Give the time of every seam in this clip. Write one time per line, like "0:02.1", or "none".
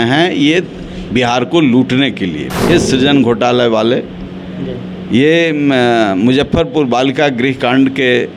0:02.4

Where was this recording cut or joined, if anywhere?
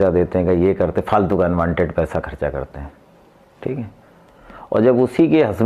none

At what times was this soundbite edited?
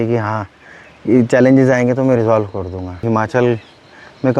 0:03.0

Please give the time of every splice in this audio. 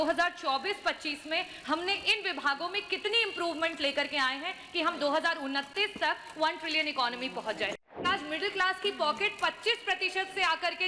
0:07.8

